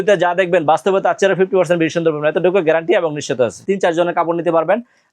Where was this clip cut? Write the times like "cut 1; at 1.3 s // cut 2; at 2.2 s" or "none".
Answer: cut 1; at 3.6 s